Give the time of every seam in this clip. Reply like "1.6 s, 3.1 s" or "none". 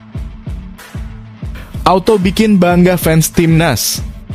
1.8 s